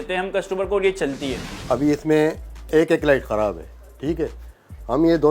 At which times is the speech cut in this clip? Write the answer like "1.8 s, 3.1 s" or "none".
1.5 s